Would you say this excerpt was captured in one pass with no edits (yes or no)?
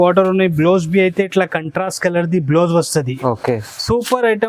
yes